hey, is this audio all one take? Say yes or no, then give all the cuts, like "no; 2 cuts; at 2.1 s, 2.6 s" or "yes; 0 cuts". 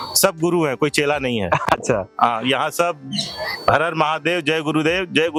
yes; 0 cuts